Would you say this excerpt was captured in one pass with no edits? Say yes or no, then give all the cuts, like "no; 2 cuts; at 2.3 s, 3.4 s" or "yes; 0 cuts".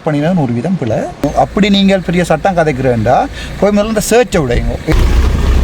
no; 2 cuts; at 1.3 s, 4.9 s